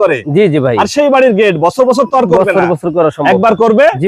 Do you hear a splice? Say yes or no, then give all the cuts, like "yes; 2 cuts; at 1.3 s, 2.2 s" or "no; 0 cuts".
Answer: no; 0 cuts